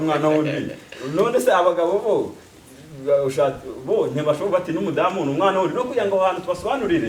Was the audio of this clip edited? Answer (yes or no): no